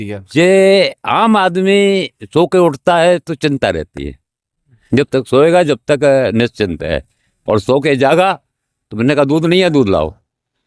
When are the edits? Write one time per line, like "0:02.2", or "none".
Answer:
none